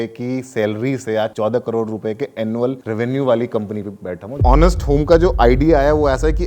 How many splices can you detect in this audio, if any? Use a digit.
3